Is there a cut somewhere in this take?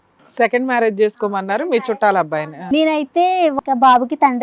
yes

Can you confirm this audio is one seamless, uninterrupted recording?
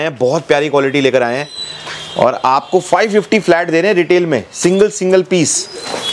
yes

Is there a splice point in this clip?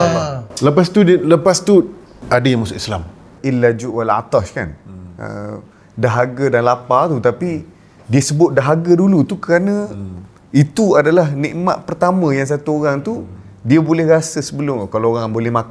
yes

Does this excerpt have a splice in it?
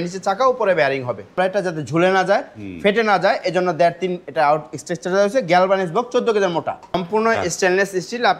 yes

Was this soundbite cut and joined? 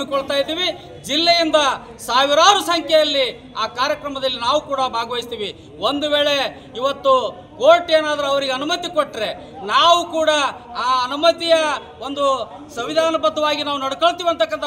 no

